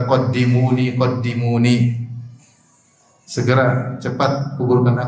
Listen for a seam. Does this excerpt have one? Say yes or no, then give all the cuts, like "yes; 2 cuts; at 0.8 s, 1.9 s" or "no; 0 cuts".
no; 0 cuts